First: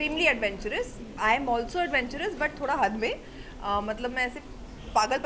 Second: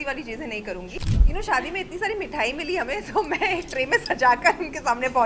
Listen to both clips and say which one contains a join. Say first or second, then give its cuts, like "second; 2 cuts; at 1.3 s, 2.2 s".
second; 1 cut; at 0.9 s